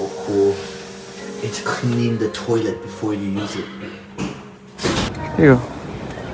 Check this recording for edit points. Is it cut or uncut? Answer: uncut